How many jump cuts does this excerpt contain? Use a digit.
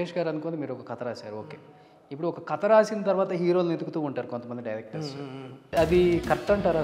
1